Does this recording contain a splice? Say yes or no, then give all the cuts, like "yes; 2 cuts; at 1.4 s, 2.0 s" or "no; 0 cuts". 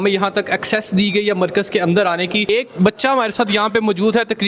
yes; 1 cut; at 2.5 s